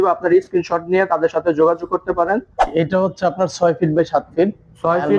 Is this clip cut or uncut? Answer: cut